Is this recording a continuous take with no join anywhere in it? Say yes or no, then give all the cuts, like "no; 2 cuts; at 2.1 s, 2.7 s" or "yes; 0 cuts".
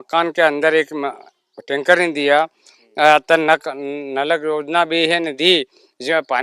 yes; 0 cuts